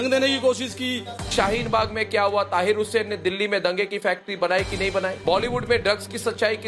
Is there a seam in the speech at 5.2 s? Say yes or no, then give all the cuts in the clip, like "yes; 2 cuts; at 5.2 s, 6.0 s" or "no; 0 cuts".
yes; 1 cut; at 5.2 s